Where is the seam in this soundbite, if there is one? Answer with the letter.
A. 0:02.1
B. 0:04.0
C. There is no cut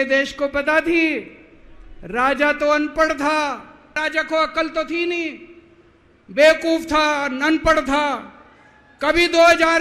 B